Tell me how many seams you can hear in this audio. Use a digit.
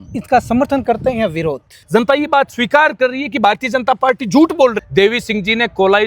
2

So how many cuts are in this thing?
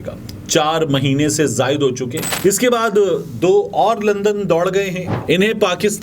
2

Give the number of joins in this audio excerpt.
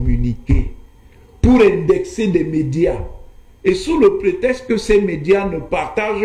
0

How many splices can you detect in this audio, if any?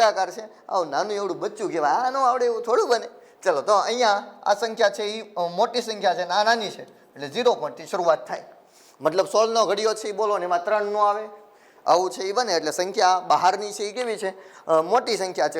0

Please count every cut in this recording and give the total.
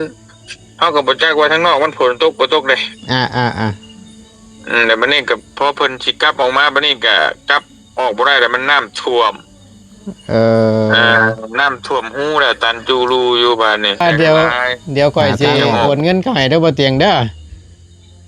1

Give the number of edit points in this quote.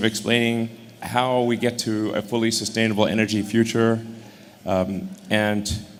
0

